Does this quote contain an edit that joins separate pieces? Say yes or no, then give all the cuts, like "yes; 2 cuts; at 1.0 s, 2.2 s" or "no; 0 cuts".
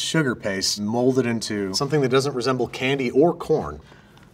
yes; 2 cuts; at 0.8 s, 1.8 s